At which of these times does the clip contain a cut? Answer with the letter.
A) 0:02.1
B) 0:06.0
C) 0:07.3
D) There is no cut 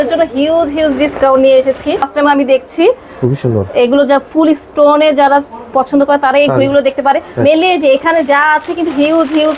A